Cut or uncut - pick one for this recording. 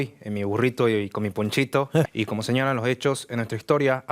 cut